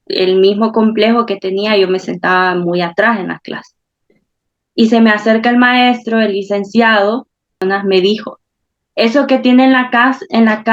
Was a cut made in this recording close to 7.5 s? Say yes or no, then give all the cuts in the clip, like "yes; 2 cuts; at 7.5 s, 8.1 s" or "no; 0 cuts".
yes; 1 cut; at 7.5 s